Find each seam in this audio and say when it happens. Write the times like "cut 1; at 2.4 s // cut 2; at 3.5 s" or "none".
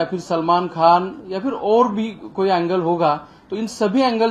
none